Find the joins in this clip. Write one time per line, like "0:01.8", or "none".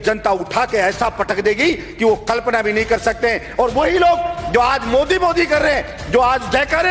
none